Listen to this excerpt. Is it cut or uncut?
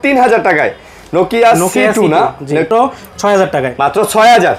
cut